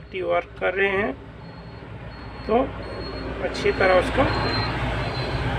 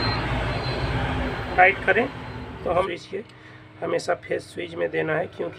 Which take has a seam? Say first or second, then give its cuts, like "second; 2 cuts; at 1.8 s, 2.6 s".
second; 1 cut; at 2.9 s